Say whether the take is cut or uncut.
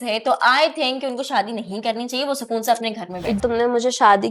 cut